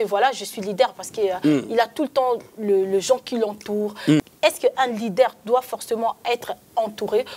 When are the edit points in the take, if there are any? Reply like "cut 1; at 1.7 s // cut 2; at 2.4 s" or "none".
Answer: none